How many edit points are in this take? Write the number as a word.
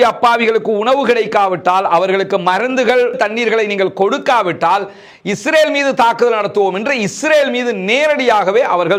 zero